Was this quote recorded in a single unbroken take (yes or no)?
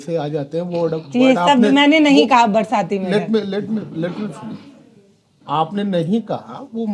yes